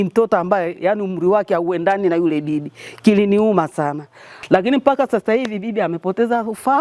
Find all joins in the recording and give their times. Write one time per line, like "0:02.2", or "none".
0:04.3